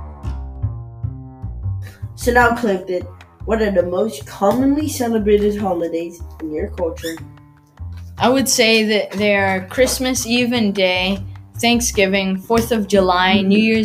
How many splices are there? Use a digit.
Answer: 1